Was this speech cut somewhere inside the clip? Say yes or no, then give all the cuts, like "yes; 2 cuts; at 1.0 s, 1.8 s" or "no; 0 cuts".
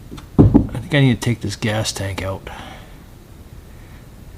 no; 0 cuts